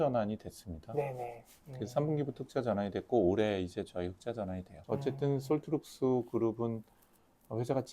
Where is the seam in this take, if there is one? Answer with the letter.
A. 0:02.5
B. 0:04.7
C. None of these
B